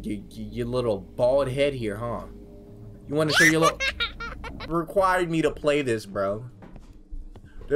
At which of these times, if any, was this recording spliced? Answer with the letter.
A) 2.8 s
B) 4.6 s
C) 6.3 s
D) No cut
B